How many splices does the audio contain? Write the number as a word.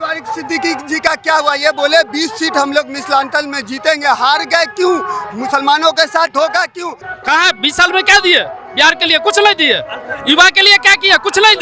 one